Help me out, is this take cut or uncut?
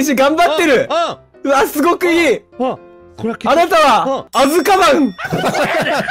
cut